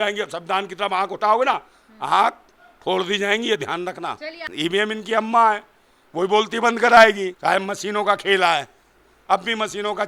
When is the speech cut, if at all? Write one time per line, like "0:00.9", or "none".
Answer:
0:04.5
0:07.3